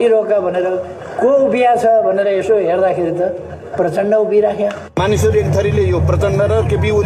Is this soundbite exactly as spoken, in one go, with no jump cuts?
no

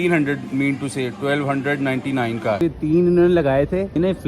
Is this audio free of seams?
no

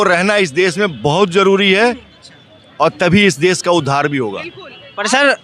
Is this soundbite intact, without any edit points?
yes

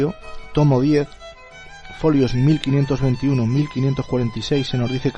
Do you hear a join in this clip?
yes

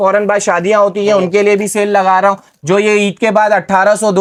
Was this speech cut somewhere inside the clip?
no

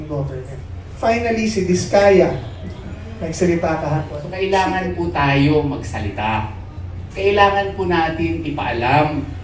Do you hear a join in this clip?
yes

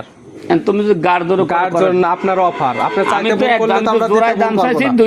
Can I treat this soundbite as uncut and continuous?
yes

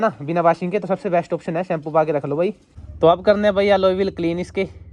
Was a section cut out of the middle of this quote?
yes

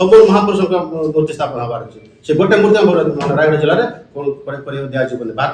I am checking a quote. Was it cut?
no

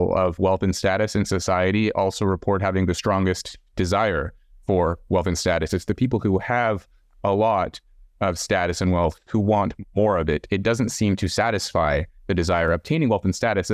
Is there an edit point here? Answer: no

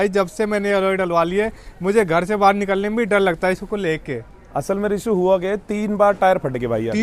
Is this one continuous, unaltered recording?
yes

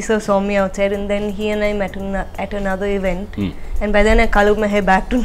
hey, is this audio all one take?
yes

